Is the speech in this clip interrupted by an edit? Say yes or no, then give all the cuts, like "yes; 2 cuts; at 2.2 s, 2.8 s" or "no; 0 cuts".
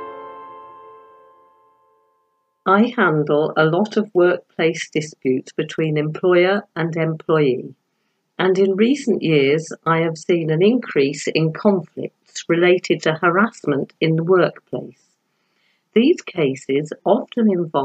yes; 1 cut; at 2.1 s